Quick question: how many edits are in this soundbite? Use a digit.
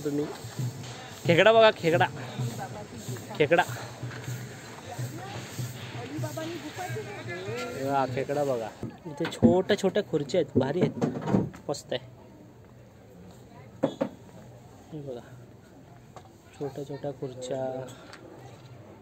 1